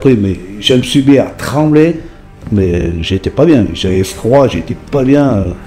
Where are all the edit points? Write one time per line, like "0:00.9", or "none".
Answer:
none

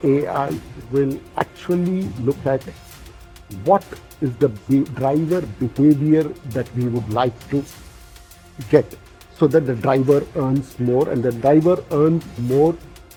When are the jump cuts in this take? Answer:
none

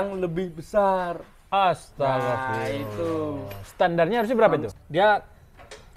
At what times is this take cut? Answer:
0:04.7

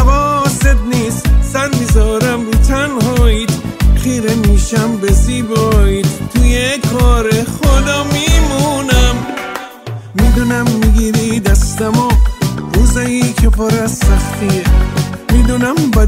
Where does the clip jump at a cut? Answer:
none

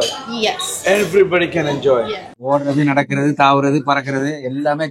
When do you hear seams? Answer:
0:02.3

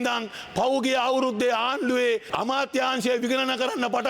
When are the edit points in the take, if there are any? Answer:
0:02.3

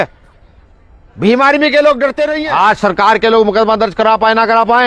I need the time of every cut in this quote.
0:02.4

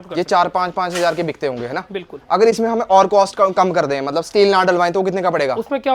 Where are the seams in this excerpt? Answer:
none

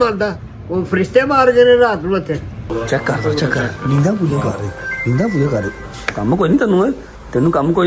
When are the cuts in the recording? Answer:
0:02.7

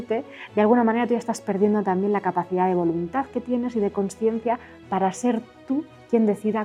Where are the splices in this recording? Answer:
none

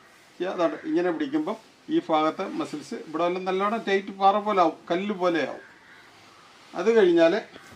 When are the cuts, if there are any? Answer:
0:05.0

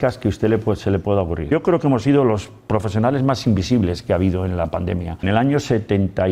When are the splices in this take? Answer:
0:01.5
0:05.1

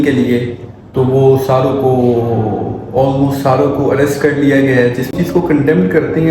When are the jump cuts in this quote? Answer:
0:05.1

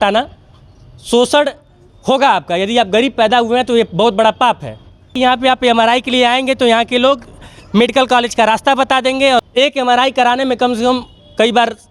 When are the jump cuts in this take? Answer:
0:05.1
0:09.4

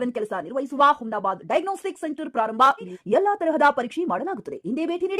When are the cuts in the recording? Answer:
0:03.0

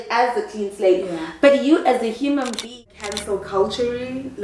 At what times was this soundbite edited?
0:02.8

